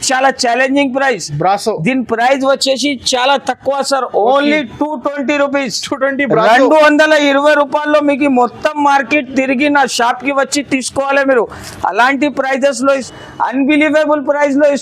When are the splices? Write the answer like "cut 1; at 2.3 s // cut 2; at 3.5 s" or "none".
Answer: cut 1; at 13.1 s